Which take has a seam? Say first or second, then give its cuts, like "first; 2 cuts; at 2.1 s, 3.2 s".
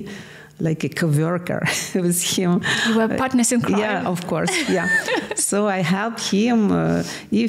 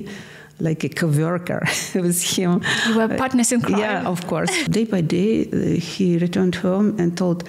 second; 1 cut; at 4.6 s